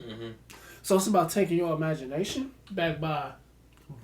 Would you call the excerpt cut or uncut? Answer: cut